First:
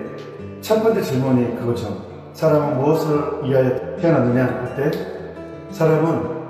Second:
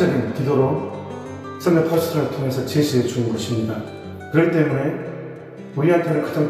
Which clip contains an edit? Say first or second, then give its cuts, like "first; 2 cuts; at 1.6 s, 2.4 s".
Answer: first; 1 cut; at 3.8 s